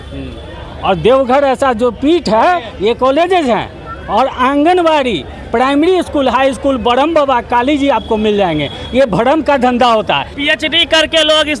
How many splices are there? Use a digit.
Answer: 1